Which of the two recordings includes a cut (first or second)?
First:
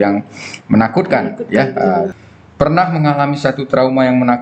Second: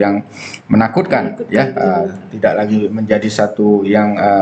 first